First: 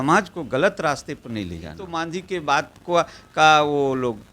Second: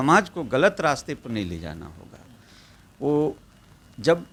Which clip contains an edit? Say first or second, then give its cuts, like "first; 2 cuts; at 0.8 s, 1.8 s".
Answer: first; 1 cut; at 1.8 s